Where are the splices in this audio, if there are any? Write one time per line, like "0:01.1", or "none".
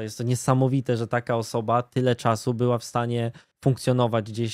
none

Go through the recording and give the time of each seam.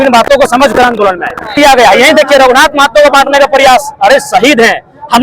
0:01.5

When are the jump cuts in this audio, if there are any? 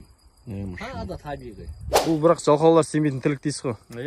0:01.8

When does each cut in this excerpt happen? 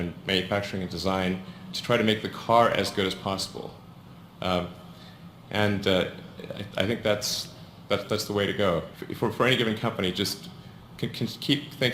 0:01.2
0:03.1
0:08.4

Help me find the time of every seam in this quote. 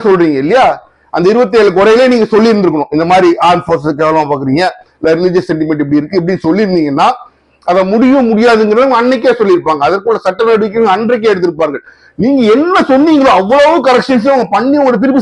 none

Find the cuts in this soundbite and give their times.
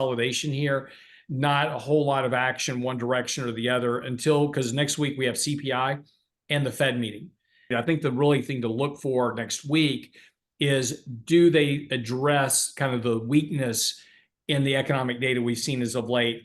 0:07.7

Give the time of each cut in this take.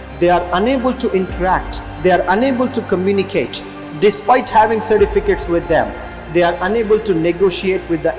none

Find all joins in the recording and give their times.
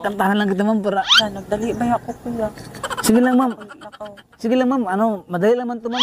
0:01.3

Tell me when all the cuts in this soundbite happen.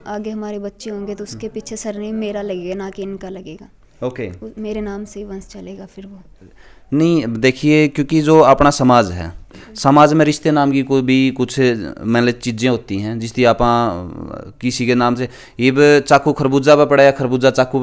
none

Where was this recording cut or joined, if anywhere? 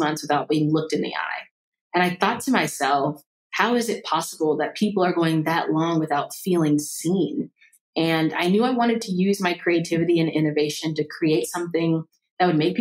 none

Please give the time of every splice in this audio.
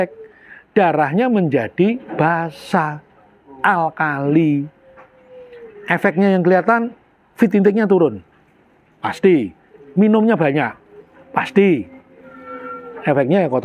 none

